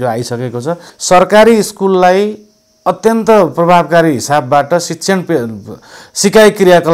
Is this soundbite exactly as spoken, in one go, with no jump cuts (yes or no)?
no